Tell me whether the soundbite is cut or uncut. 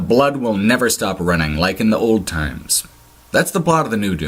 uncut